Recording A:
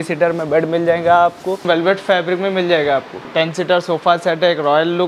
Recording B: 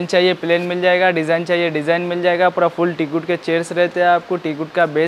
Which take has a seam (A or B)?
A